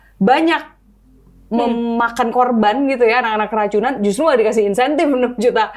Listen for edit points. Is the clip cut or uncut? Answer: uncut